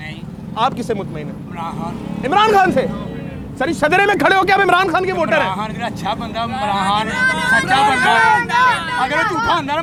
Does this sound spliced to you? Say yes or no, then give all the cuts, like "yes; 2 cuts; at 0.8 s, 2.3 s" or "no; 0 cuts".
no; 0 cuts